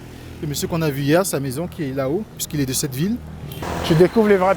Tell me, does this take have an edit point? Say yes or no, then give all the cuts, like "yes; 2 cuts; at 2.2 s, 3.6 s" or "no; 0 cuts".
yes; 1 cut; at 3.6 s